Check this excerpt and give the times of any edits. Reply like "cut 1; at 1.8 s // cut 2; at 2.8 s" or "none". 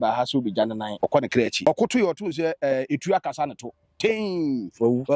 cut 1; at 1.2 s